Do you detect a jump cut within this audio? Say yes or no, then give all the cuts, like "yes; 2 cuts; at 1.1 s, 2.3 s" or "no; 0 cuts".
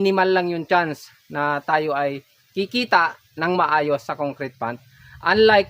no; 0 cuts